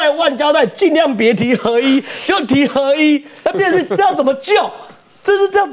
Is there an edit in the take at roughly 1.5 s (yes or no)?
no